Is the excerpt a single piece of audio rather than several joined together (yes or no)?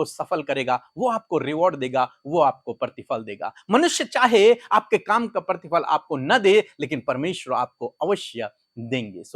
yes